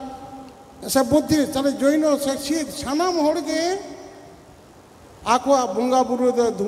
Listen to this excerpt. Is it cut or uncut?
uncut